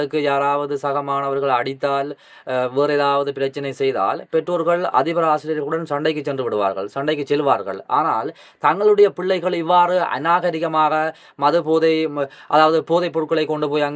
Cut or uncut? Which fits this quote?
uncut